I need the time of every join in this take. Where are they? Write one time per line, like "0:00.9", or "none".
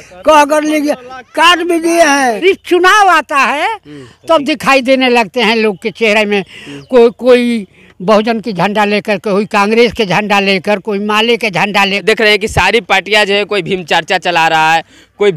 0:02.4
0:12.0